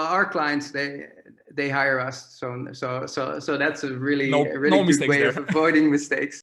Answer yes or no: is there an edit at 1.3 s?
no